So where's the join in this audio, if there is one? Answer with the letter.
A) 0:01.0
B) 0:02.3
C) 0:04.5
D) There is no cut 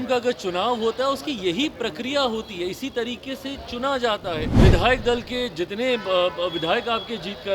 C